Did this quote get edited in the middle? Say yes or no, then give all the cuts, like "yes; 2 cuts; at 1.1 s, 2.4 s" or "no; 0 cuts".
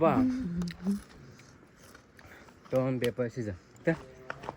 no; 0 cuts